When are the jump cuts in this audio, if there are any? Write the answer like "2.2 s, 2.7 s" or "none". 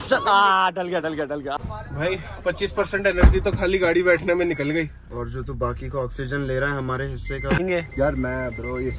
1.6 s, 5.0 s, 7.6 s

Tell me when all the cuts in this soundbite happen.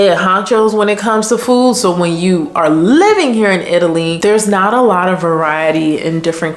4.1 s

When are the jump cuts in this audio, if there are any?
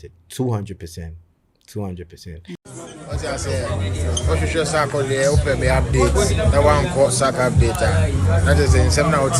2.5 s

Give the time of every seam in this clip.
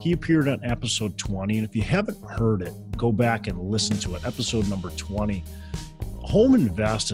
none

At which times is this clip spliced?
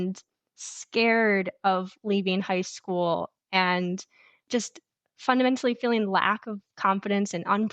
4.4 s

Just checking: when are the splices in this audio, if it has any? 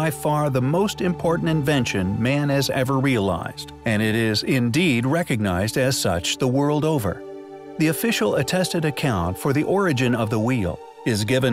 5.1 s

